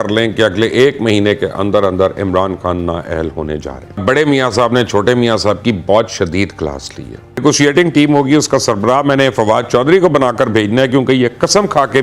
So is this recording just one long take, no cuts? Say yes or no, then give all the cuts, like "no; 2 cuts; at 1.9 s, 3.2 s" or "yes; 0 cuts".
no; 2 cuts; at 4.0 s, 7.4 s